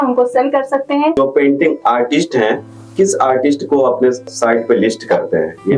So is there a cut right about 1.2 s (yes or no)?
yes